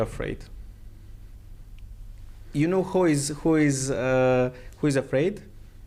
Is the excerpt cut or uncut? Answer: uncut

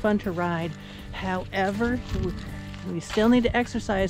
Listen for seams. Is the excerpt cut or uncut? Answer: uncut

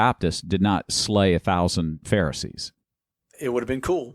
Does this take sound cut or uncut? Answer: cut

